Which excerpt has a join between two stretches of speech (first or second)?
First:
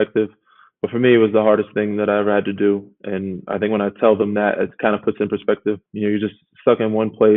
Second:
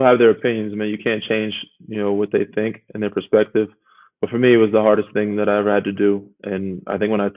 first